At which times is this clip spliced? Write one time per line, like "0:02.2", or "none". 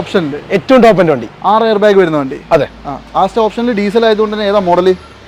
none

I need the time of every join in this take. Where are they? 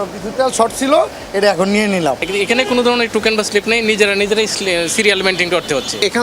0:02.2

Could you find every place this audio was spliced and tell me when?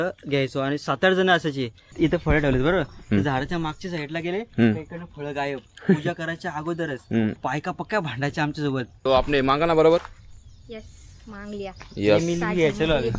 0:01.9
0:07.3
0:08.9

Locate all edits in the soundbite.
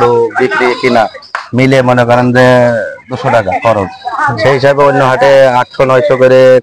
none

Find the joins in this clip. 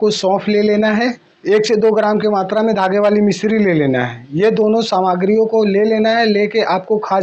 0:01.3

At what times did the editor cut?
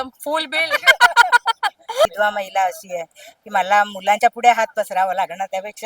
0:02.1

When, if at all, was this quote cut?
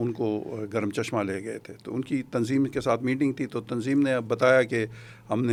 none

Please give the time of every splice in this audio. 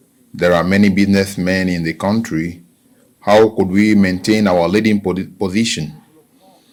none

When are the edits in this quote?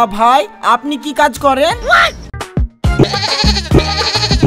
0:02.3

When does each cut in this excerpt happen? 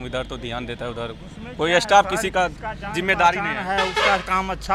none

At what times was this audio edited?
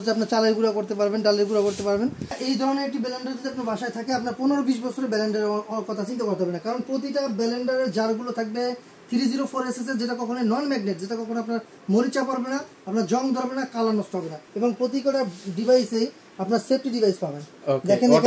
0:02.4
0:14.4

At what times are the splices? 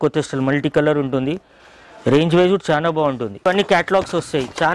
0:03.5

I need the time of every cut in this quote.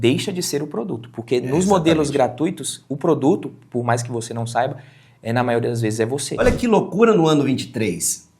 0:06.4

